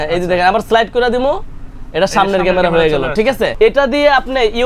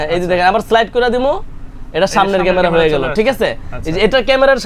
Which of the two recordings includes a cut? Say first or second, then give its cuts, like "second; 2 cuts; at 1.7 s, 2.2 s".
first; 1 cut; at 3.5 s